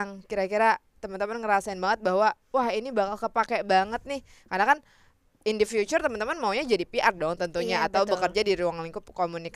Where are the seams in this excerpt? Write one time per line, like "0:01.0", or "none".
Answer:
none